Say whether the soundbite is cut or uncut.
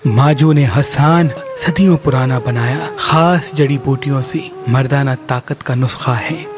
cut